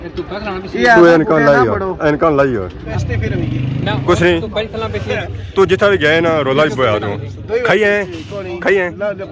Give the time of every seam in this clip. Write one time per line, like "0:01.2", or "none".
0:02.8